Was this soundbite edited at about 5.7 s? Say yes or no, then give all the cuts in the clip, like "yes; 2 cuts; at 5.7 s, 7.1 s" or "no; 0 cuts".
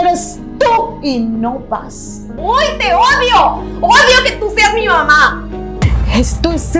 yes; 2 cuts; at 2.3 s, 5.7 s